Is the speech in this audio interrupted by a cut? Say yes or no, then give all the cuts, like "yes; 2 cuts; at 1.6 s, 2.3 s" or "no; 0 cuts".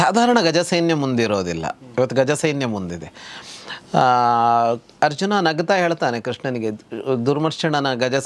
no; 0 cuts